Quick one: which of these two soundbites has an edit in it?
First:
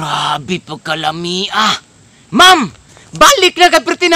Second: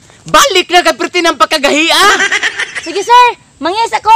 second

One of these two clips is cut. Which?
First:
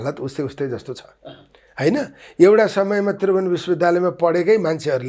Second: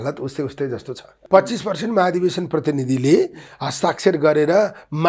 second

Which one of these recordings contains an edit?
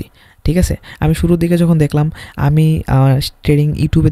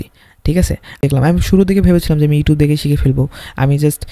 second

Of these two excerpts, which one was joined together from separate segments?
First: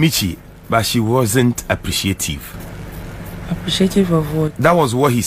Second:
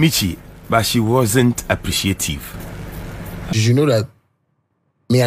second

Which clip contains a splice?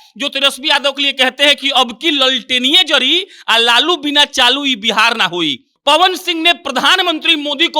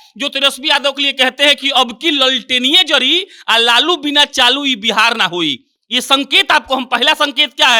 first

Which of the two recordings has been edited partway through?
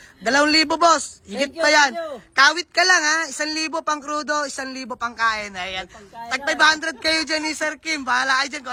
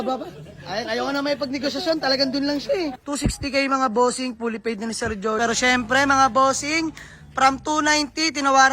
second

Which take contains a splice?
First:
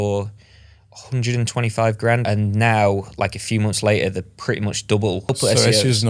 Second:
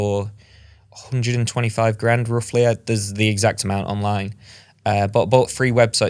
first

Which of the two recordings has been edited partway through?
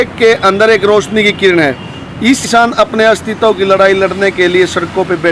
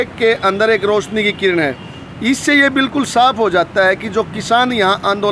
first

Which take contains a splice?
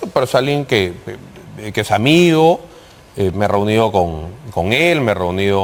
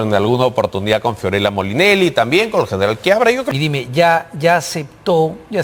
second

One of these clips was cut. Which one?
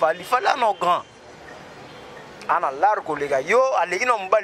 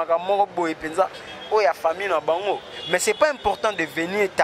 second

